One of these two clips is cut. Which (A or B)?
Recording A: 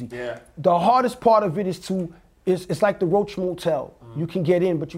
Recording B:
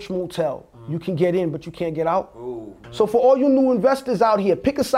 B